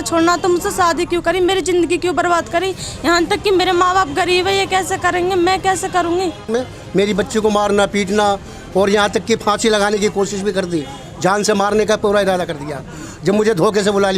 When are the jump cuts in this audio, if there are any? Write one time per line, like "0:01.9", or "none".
0:06.5